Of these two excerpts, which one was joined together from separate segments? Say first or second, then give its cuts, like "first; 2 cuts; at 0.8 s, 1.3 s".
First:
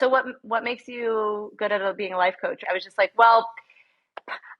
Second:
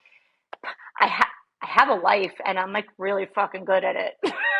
first; 1 cut; at 2.6 s